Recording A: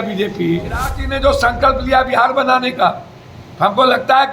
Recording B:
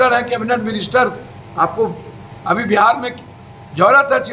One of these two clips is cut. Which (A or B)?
A